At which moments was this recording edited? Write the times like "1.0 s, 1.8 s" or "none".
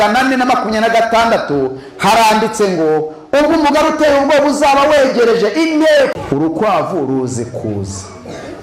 6.1 s

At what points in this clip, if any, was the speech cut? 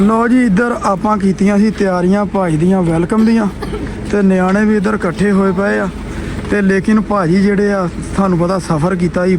none

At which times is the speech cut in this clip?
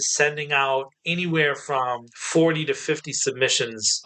none

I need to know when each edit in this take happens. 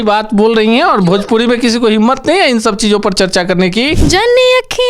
4.0 s

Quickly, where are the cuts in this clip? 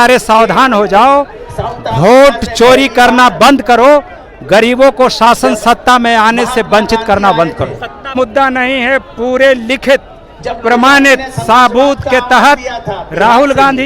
8.2 s

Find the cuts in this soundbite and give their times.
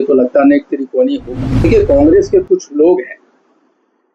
1.6 s

